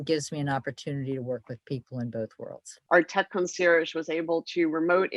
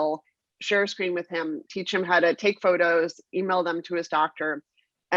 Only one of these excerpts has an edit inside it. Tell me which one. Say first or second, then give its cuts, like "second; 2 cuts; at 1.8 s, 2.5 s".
first; 1 cut; at 2.7 s